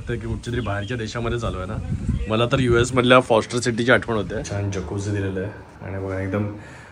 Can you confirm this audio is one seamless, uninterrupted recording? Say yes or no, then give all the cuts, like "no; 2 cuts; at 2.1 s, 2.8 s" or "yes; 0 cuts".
no; 1 cut; at 4.5 s